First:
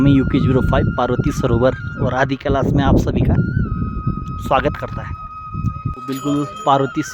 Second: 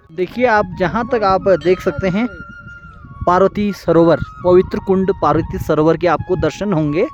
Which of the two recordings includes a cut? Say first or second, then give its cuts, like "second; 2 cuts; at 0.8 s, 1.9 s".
first; 1 cut; at 6.0 s